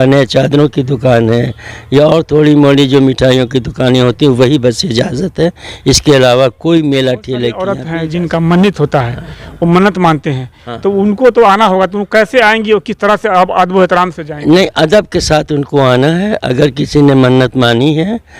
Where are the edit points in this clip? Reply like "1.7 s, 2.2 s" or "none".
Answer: 7.6 s

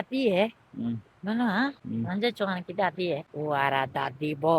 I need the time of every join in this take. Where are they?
1.8 s, 3.3 s

